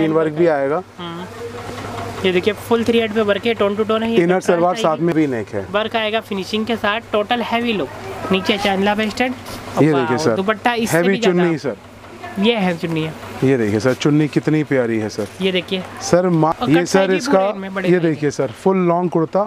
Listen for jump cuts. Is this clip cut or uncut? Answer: cut